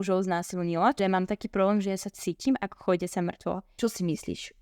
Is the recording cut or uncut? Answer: cut